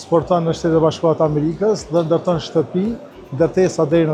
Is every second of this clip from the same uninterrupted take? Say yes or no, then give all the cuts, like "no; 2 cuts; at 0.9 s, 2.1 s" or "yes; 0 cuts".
yes; 0 cuts